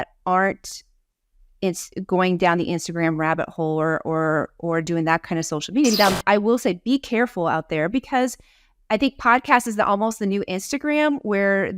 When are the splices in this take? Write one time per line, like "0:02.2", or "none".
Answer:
0:06.0